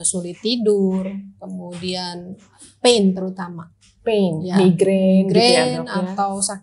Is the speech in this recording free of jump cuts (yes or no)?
yes